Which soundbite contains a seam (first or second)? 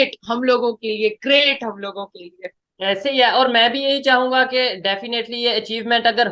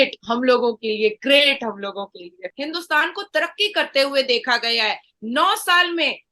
second